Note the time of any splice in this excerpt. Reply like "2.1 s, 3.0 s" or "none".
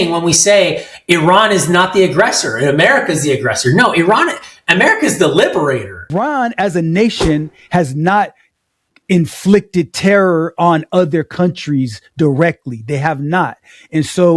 6.1 s